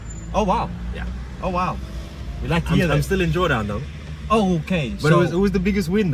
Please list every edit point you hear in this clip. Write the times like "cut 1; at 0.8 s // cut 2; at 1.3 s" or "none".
none

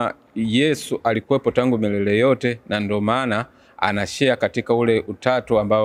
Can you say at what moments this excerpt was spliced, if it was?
none

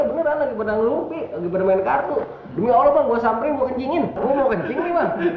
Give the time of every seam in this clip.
cut 1; at 4.2 s

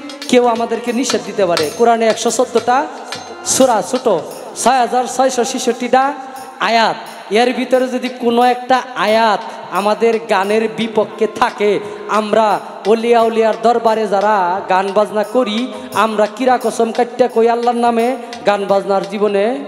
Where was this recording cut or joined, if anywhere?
none

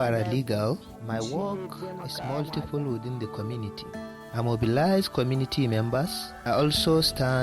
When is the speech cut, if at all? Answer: cut 1; at 0.9 s // cut 2; at 4.3 s // cut 3; at 6.3 s

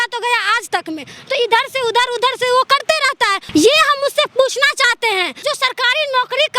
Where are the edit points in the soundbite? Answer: cut 1; at 3.4 s // cut 2; at 5.4 s

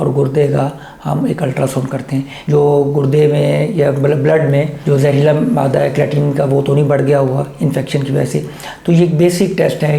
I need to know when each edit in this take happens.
cut 1; at 2.4 s

